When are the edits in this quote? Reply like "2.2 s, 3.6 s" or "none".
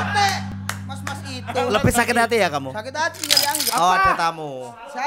3.6 s